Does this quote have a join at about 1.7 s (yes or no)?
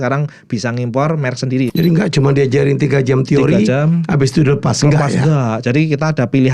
yes